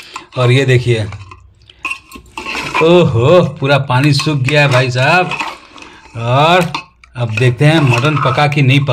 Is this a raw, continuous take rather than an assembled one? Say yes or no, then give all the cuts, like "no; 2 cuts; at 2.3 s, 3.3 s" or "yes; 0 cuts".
yes; 0 cuts